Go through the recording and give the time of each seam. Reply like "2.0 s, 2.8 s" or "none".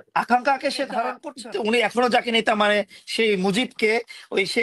1.2 s